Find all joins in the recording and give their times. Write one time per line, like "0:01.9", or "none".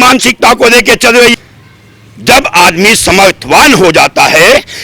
0:01.3